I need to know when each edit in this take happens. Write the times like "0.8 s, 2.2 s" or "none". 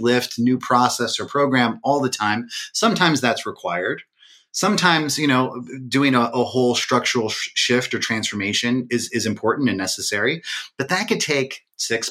none